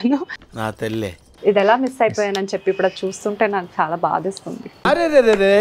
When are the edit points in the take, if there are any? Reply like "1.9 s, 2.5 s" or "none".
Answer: 1.3 s